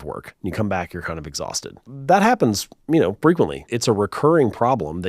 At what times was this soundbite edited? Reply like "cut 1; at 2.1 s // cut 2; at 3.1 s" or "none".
cut 1; at 1.9 s // cut 2; at 3.7 s